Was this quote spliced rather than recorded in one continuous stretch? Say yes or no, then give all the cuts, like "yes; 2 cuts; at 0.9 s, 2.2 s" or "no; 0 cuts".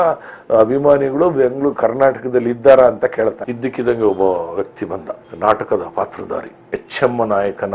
yes; 1 cut; at 3.5 s